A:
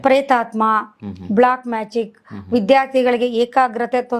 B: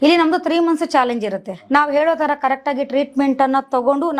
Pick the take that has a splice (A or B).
B